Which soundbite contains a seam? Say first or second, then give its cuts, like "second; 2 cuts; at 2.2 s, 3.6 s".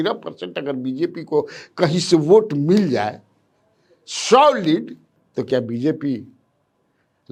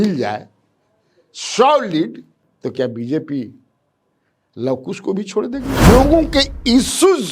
second; 1 cut; at 5.9 s